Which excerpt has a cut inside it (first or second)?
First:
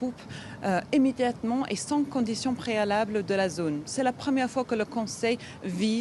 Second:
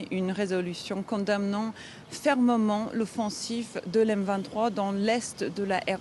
first